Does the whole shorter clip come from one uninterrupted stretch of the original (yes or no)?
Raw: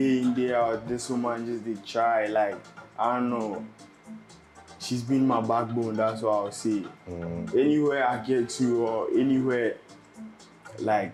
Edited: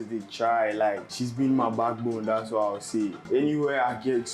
no